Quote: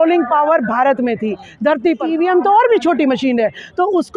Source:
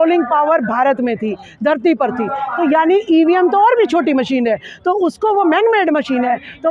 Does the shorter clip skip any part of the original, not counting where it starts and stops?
yes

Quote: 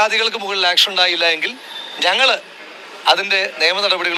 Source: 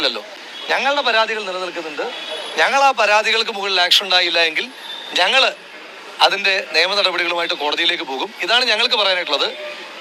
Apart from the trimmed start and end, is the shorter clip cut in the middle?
no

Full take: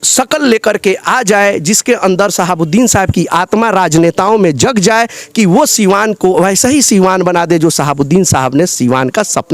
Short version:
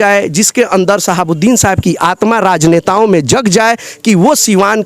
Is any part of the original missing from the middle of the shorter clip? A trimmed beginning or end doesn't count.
no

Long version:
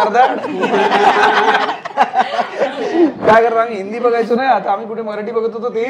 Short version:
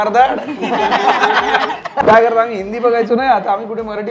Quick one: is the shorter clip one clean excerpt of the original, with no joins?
no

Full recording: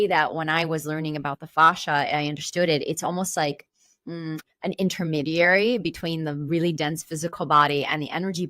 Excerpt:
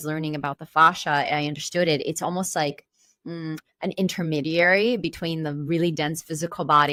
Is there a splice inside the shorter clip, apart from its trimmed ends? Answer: no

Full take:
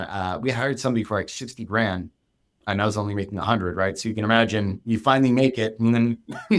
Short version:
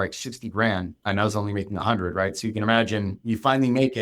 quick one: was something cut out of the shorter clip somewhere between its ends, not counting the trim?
yes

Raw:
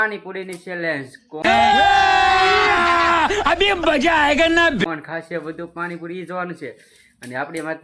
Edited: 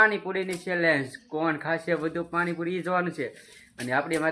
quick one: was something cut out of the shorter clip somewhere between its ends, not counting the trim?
yes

